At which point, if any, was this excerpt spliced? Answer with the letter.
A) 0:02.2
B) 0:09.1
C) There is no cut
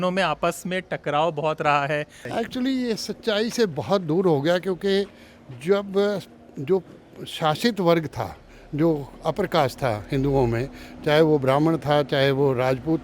A